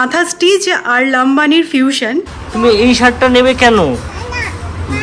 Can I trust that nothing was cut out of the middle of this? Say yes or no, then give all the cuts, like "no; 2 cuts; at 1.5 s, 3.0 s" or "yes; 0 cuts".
no; 1 cut; at 2.4 s